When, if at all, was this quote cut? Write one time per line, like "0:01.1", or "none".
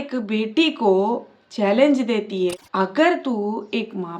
0:02.7